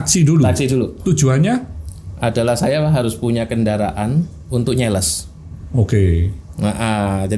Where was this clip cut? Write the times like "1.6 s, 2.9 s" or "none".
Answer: none